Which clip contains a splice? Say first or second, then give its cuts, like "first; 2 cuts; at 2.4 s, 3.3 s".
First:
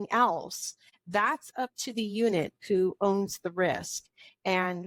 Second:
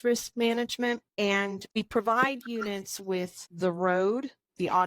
second; 2 cuts; at 1.6 s, 3.5 s